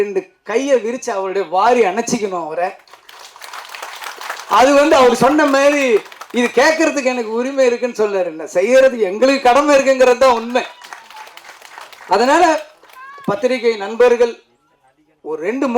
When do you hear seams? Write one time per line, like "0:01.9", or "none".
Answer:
none